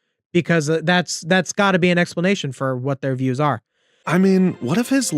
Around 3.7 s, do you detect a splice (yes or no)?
yes